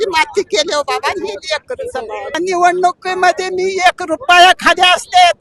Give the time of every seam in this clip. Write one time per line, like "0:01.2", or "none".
0:02.3